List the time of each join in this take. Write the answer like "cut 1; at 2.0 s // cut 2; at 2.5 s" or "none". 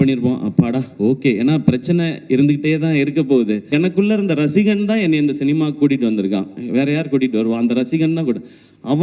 cut 1; at 3.7 s